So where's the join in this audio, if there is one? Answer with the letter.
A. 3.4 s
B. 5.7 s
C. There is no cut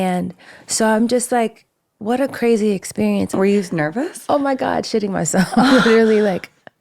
A